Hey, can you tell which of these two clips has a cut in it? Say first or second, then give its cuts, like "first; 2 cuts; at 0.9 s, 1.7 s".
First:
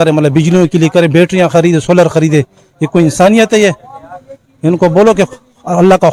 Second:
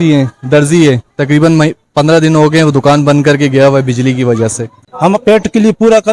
second; 1 cut; at 4.8 s